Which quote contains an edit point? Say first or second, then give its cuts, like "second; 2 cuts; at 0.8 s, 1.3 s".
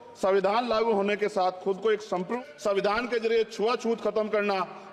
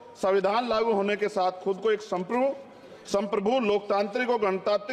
first; 1 cut; at 2.3 s